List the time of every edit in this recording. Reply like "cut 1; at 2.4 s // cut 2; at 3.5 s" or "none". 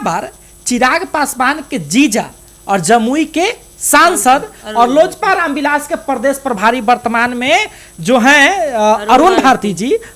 none